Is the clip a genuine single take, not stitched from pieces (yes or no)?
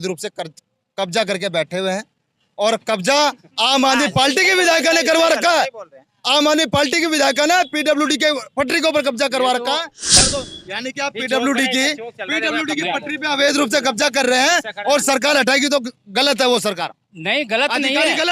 no